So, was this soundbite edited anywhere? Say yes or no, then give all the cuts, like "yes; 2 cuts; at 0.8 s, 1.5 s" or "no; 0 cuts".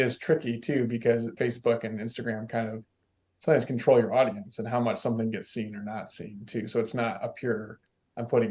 yes; 1 cut; at 1.3 s